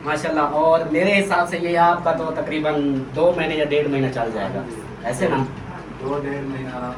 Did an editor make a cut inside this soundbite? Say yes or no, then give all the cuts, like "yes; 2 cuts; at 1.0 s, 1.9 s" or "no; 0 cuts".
no; 0 cuts